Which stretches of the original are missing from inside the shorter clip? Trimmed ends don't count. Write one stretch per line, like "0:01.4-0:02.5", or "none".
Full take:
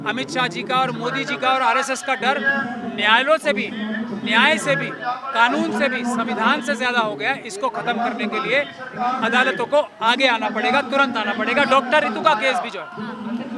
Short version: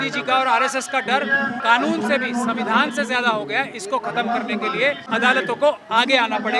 0:02.7-0:05.3
0:08.8-0:09.2